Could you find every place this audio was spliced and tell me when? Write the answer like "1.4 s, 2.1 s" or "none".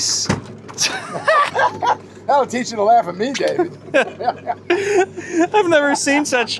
none